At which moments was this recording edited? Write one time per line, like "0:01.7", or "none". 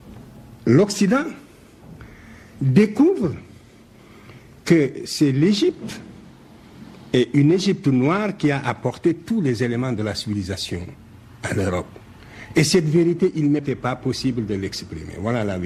none